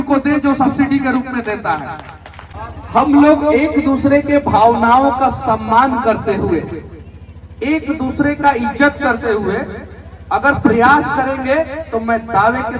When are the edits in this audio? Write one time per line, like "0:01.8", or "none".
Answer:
0:02.7